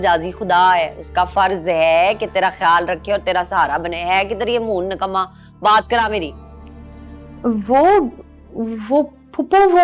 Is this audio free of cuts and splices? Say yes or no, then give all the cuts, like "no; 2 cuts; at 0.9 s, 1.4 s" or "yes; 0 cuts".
yes; 0 cuts